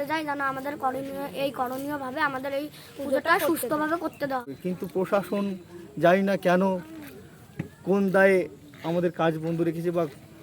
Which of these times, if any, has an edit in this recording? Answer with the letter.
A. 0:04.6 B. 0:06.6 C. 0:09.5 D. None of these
A